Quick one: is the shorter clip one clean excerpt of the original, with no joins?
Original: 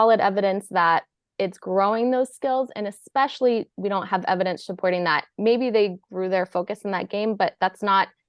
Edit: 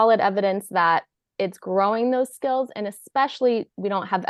yes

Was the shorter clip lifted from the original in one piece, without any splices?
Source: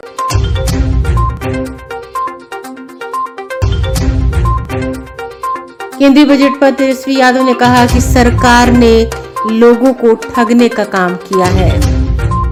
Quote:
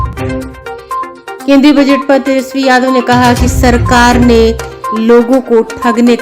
no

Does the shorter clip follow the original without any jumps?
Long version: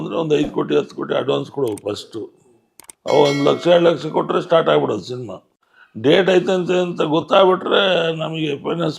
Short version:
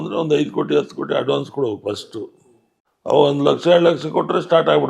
yes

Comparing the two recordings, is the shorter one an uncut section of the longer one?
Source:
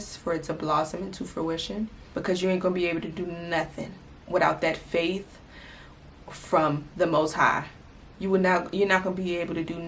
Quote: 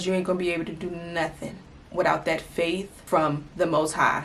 no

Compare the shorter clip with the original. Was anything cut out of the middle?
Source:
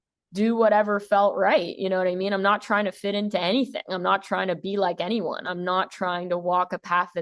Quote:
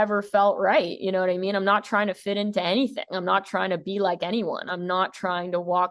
no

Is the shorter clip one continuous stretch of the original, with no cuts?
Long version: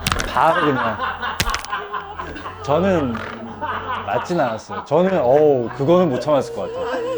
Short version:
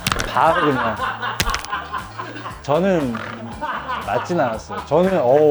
yes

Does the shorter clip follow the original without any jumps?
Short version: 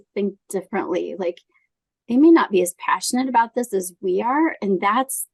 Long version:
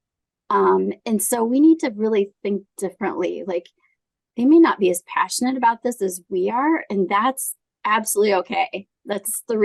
yes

